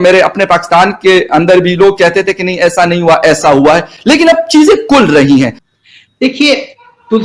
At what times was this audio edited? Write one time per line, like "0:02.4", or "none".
0:05.6

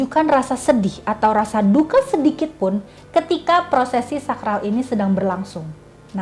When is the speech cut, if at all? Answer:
none

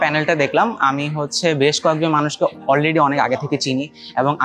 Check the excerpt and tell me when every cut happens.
none

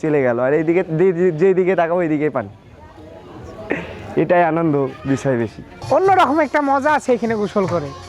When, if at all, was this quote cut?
none

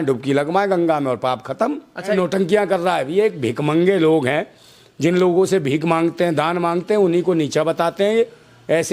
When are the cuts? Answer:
0:02.2

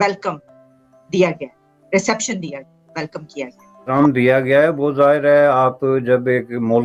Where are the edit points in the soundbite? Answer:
none

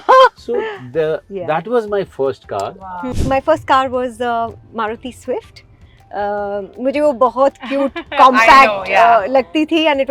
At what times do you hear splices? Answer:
0:03.0

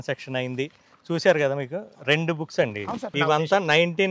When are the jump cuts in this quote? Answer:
0:03.2

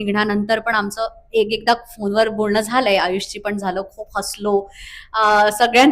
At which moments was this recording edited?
none

